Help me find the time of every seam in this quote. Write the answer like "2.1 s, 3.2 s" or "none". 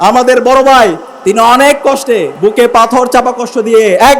1.1 s, 2.3 s